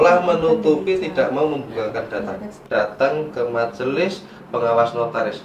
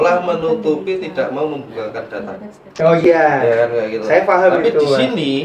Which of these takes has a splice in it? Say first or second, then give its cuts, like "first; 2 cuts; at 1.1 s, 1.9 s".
first; 1 cut; at 2.6 s